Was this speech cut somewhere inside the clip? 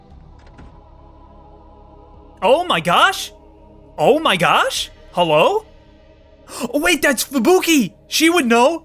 no; 0 cuts

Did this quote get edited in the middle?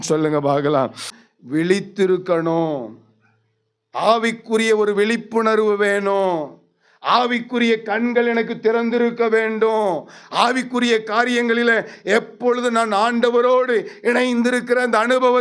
yes; 1 cut; at 1.1 s

